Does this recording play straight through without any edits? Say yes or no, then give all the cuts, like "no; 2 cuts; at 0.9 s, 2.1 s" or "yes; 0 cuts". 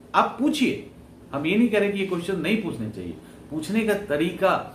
yes; 0 cuts